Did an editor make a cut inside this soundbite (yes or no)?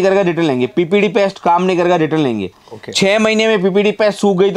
no